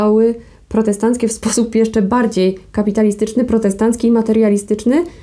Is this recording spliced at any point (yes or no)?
no